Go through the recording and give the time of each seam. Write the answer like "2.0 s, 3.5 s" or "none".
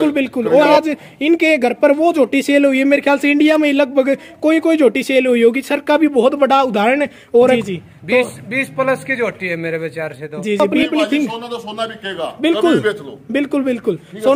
0.8 s, 7.6 s, 10.6 s